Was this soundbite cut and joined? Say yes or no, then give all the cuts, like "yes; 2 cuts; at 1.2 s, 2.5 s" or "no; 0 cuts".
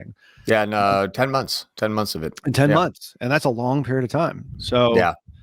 no; 0 cuts